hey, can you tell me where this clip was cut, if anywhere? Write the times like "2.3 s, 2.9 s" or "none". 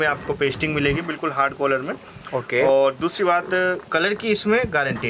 none